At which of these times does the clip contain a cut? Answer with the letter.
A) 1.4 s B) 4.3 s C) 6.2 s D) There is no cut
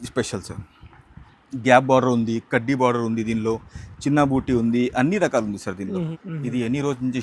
C